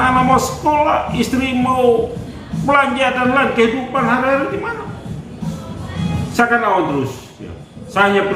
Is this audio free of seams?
yes; 0 cuts

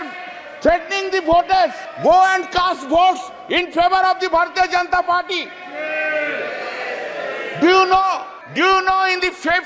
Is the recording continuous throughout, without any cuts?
no; 2 cuts; at 1.9 s, 8.4 s

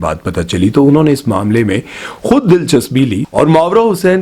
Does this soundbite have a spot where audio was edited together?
no; 0 cuts

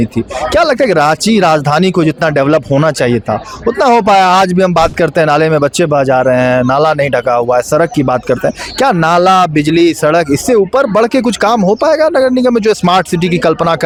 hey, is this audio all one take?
yes; 0 cuts

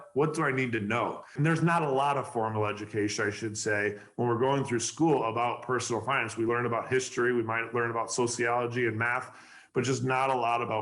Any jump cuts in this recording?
yes; 1 cut; at 1.3 s

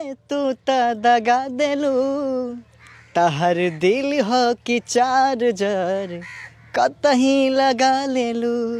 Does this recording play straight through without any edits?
yes; 0 cuts

